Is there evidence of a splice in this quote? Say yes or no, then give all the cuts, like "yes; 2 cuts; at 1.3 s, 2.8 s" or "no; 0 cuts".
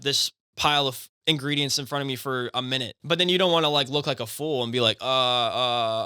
yes; 1 cut; at 2.9 s